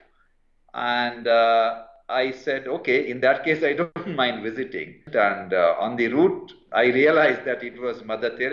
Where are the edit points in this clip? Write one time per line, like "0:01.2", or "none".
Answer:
0:04.0
0:05.0

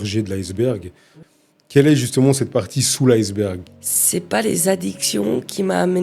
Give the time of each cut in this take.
0:03.7

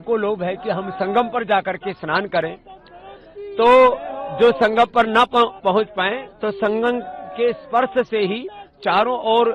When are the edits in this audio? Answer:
none

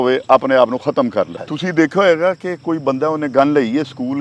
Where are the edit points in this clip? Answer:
0:01.4

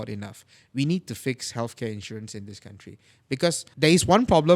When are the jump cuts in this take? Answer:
0:03.7

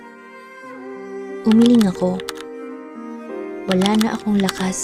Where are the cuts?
none

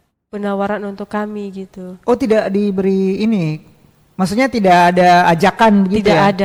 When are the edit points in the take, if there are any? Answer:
none

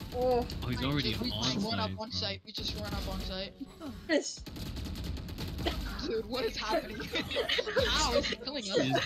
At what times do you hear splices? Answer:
0:04.1

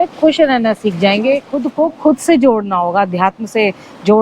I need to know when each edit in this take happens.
0:01.6

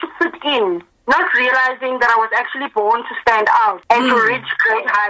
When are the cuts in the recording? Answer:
0:03.8

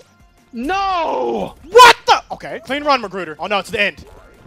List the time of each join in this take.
0:01.6
0:02.7

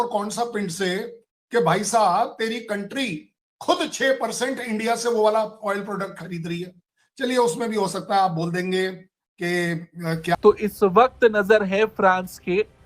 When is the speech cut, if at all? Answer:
0:10.4

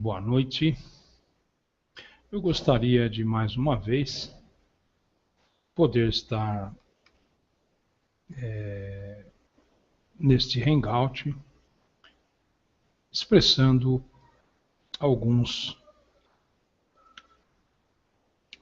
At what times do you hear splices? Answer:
0:08.8

